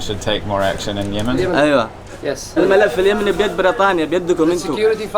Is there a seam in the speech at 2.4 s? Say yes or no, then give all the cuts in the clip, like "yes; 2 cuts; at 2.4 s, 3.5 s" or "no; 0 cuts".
yes; 1 cut; at 2.4 s